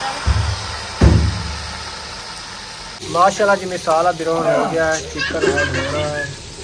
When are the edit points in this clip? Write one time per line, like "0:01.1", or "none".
0:02.9